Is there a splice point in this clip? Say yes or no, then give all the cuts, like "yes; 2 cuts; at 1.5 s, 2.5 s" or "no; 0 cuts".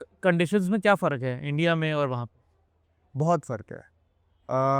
no; 0 cuts